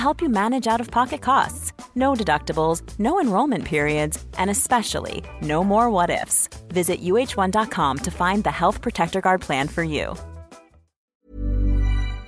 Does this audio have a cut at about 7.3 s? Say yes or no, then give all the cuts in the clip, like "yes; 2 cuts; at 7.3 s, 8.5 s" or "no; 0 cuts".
no; 1 cut; at 11.1 s